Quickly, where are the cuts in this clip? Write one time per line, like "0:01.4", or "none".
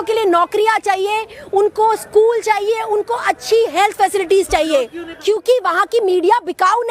0:05.1